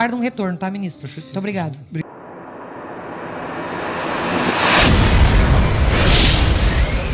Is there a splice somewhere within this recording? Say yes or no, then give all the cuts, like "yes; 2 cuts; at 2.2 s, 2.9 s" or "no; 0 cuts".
yes; 1 cut; at 2.1 s